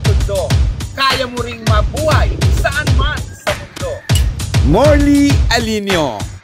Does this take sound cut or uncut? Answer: uncut